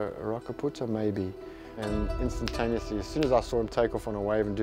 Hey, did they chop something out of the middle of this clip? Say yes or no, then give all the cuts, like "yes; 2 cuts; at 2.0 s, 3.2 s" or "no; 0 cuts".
yes; 1 cut; at 1.8 s